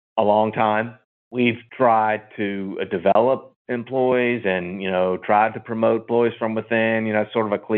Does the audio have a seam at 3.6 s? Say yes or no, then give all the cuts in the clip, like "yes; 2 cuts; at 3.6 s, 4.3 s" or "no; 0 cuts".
no; 1 cut; at 1.3 s